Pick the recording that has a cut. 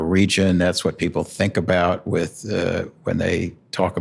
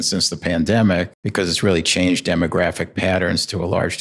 second; 1 cut; at 1.2 s

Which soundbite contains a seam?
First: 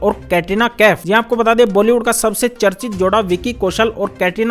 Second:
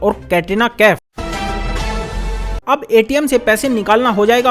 second; 1 cut; at 1.0 s

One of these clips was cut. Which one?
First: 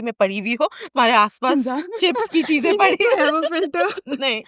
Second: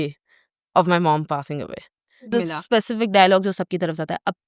second; 1 cut; at 2.5 s

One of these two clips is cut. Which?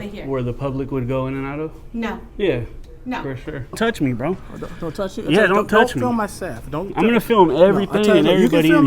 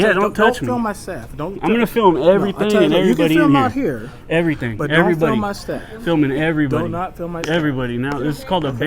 first; 1 cut; at 3.8 s

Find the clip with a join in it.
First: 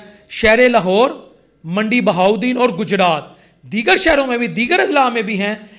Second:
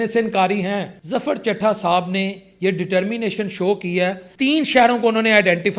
second; 2 cuts; at 0.9 s, 4.2 s

